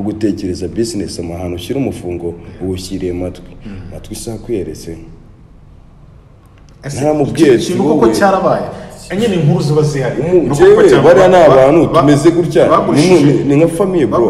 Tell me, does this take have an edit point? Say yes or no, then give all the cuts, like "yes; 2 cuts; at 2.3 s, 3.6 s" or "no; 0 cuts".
no; 0 cuts